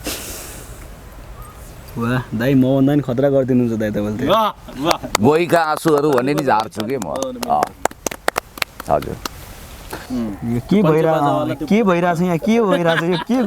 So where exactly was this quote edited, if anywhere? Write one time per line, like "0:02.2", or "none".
0:10.0

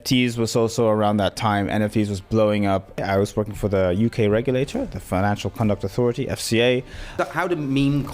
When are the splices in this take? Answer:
0:03.0
0:07.1

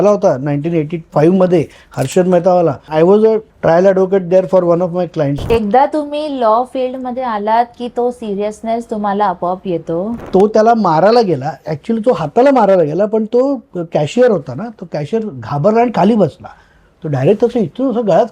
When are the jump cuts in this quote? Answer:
0:01.0
0:02.9
0:03.5
0:05.4
0:10.2

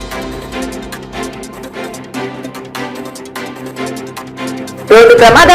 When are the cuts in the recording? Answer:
0:02.9

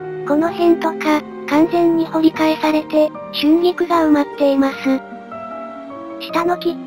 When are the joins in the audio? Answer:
0:05.7

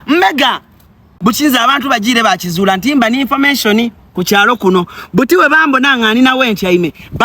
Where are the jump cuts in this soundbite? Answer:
0:01.0

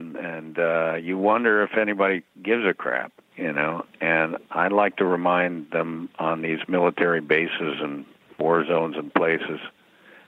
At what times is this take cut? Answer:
0:04.4

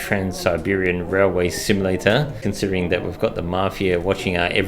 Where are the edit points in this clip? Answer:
0:02.3

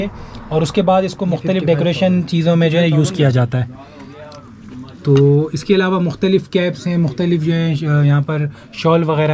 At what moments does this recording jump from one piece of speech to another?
none

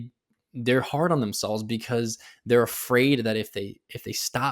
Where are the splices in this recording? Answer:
none

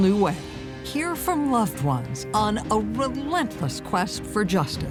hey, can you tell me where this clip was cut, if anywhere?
none

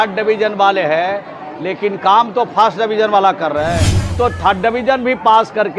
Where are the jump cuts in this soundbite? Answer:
0:04.1

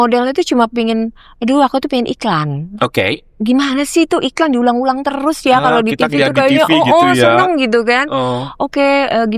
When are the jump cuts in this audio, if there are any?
none

